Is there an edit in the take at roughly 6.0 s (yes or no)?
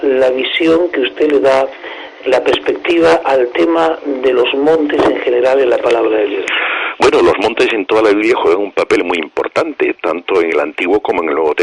yes